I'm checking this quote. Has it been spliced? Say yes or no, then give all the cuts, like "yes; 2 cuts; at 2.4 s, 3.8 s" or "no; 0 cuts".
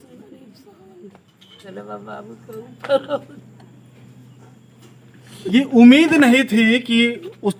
yes; 1 cut; at 1.7 s